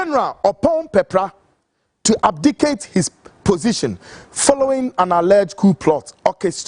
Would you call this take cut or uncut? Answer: uncut